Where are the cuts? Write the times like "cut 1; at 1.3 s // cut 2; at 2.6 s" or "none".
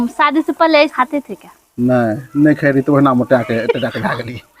cut 1; at 0.9 s

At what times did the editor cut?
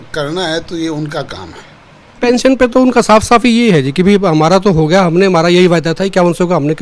cut 1; at 2.2 s

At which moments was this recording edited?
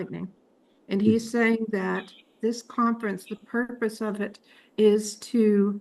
none

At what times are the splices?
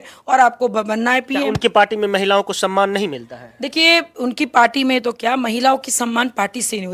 none

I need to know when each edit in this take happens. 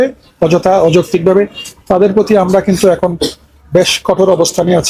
none

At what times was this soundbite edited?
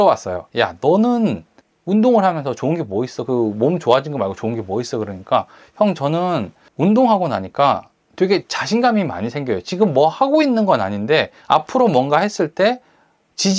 cut 1; at 6.6 s

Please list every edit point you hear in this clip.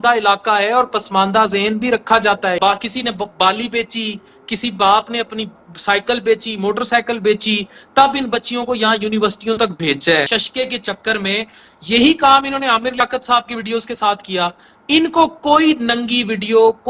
cut 1; at 2.6 s // cut 2; at 10.3 s

